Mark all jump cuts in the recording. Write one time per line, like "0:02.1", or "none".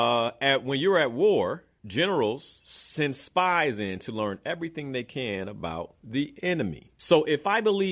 0:01.7
0:06.0
0:06.9